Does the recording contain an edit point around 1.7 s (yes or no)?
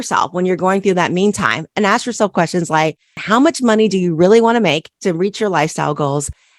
no